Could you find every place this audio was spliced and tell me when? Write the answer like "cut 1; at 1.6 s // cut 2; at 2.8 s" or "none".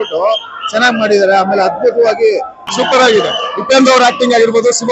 cut 1; at 2.6 s